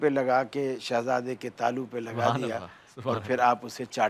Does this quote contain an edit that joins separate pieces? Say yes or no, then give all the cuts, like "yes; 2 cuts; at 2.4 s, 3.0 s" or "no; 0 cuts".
no; 0 cuts